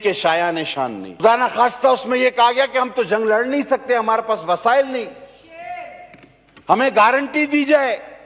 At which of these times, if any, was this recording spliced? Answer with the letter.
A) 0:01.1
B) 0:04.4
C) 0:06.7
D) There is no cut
A